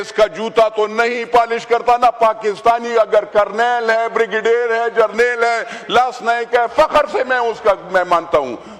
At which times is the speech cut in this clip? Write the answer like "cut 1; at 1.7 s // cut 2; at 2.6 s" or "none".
none